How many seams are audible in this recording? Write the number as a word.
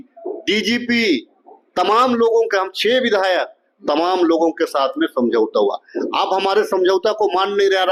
zero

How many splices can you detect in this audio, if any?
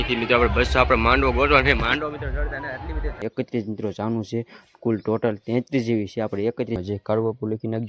two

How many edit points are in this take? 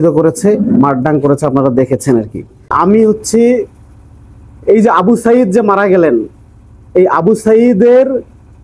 one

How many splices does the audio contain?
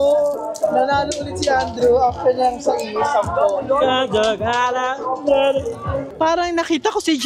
one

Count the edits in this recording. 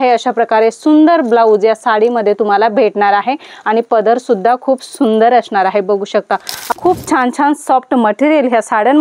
one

